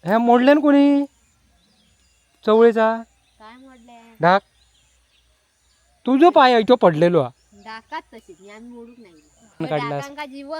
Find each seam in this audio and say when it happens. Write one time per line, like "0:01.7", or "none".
0:09.6